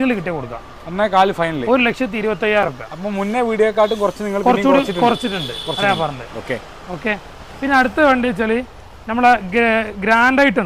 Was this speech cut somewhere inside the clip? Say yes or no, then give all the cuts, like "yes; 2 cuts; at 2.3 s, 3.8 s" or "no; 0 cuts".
no; 0 cuts